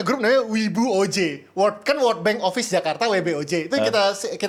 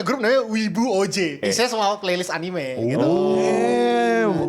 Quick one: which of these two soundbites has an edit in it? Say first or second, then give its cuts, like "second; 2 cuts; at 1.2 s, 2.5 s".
second; 1 cut; at 1.4 s